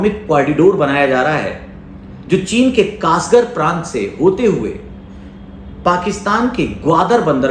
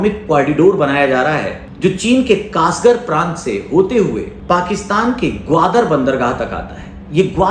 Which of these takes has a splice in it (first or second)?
second